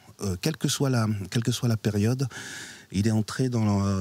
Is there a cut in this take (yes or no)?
no